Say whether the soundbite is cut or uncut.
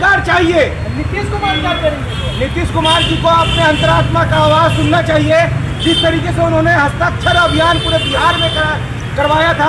uncut